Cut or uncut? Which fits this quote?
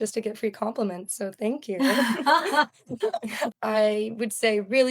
cut